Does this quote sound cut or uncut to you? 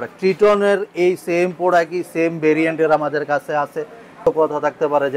cut